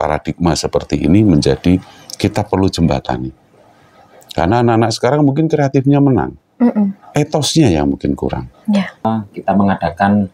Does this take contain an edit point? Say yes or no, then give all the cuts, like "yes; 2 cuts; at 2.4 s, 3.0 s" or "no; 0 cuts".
yes; 1 cut; at 9.1 s